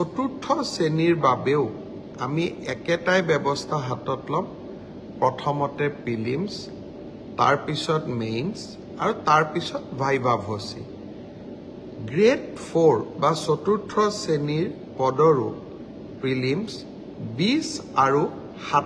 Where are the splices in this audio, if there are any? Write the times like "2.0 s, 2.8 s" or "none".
none